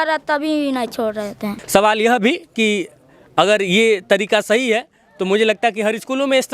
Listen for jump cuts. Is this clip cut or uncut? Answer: cut